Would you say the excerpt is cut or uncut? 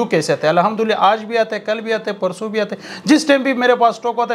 uncut